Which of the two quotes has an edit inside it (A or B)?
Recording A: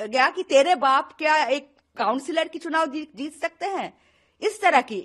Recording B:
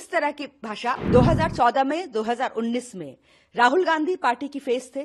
B